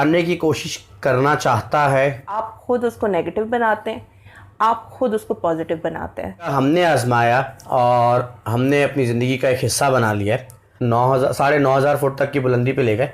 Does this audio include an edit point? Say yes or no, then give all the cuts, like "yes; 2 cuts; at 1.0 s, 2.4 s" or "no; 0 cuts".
yes; 3 cuts; at 2.4 s, 6.5 s, 10.7 s